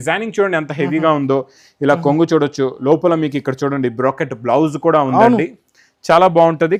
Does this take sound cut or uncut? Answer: uncut